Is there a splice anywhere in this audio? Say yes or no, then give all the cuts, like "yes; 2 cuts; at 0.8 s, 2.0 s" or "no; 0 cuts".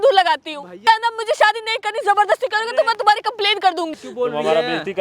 yes; 2 cuts; at 0.9 s, 4.0 s